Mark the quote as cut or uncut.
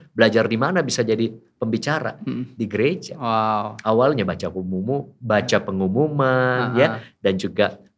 uncut